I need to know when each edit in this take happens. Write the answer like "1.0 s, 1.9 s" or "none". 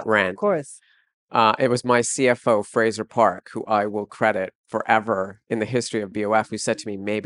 5.4 s